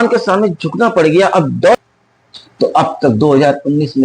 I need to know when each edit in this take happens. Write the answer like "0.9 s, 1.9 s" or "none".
1.8 s

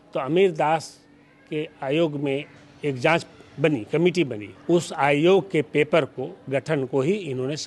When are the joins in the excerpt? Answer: 4.5 s

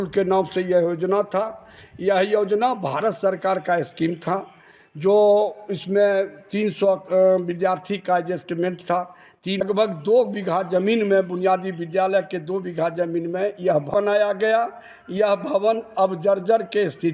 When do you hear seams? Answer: 9.6 s, 13.9 s

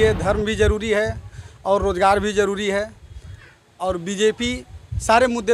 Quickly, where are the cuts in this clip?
none

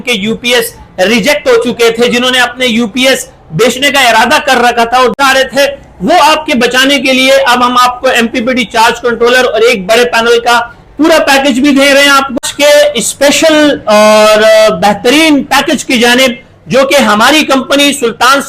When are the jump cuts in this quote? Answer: 5.2 s, 12.4 s

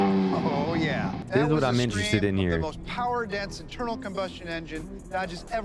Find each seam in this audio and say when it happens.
1.2 s

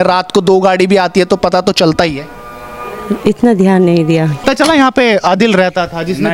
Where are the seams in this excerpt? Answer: 4.4 s

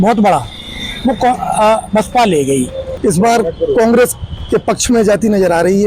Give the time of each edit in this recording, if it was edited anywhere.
2.8 s

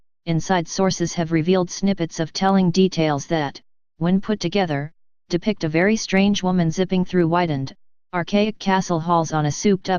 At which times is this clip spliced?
none

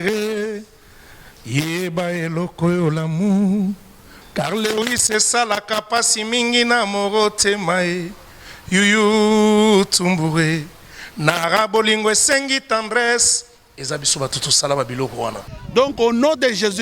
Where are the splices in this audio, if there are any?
15.6 s

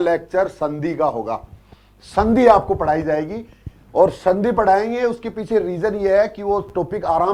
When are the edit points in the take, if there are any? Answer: none

